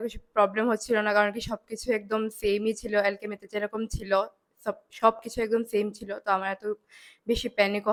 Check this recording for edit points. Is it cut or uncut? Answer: uncut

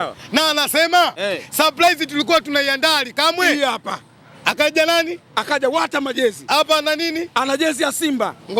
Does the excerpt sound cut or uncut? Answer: uncut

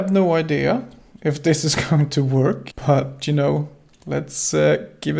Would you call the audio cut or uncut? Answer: cut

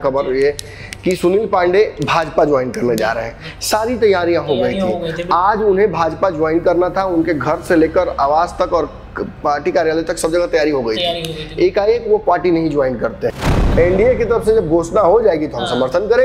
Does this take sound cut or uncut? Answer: cut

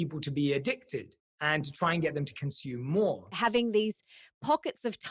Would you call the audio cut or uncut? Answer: cut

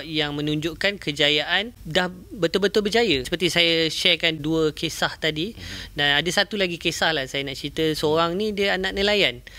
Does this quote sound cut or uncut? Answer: cut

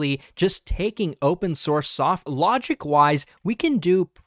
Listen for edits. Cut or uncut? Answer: cut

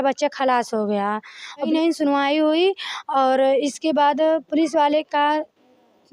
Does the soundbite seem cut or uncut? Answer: cut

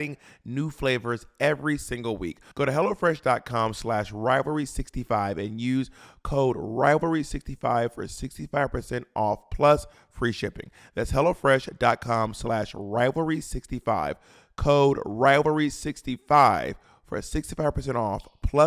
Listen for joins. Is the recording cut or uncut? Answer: cut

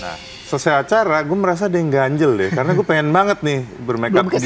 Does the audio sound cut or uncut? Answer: uncut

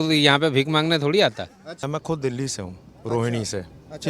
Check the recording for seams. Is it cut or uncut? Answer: cut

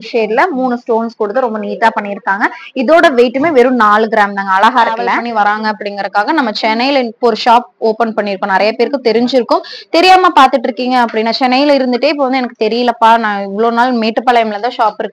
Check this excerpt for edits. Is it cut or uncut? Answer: cut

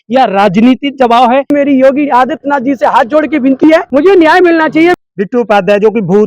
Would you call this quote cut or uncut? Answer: cut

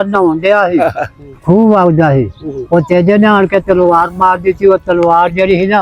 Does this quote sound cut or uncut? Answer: uncut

